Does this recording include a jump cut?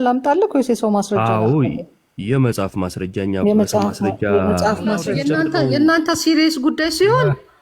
yes; 1 cut; at 5.1 s

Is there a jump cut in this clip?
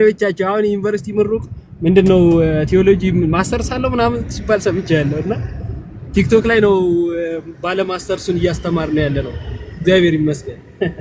no; 0 cuts

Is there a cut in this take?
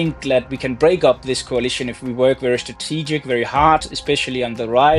no; 0 cuts

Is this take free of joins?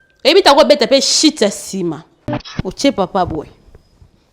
no; 1 cut; at 2.6 s

